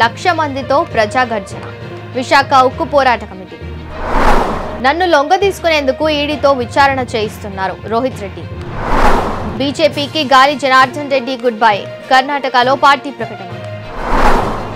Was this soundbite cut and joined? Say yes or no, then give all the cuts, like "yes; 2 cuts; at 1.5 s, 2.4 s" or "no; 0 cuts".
no; 0 cuts